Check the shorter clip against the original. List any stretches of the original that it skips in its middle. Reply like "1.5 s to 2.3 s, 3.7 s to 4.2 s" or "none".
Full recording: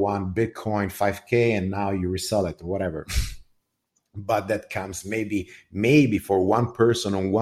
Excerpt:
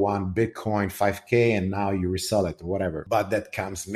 3.0 s to 4.2 s